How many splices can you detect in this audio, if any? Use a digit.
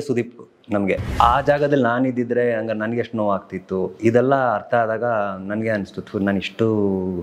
1